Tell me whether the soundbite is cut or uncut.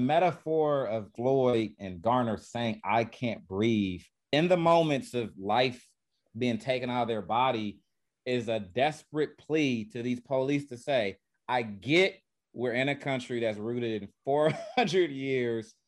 cut